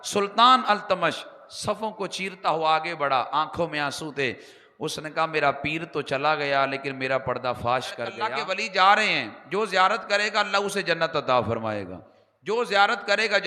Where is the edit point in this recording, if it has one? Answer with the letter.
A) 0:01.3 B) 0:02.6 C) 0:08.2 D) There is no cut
C